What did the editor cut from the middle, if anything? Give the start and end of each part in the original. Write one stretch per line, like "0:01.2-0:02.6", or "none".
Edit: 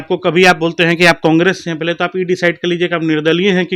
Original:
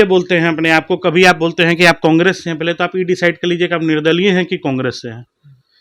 none